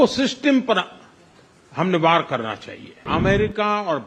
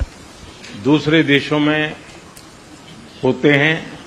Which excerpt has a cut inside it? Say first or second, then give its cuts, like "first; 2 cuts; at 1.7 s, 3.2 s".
first; 1 cut; at 3.0 s